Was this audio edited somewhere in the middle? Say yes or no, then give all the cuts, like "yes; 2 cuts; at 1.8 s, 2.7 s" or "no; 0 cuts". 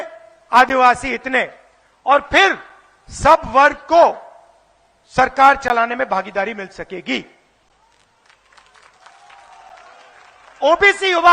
no; 0 cuts